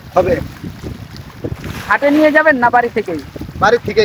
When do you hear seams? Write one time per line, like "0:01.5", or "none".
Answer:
none